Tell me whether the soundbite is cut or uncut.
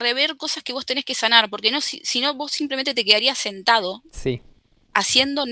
uncut